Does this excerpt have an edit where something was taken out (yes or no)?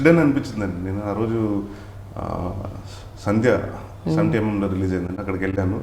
no